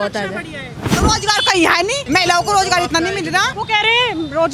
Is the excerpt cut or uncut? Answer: cut